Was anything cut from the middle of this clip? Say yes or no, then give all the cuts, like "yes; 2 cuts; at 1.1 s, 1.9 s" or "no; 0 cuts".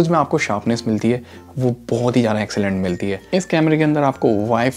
yes; 1 cut; at 3.2 s